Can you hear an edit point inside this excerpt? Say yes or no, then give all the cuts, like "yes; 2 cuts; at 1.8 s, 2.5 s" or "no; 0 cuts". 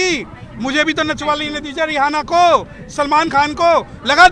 no; 0 cuts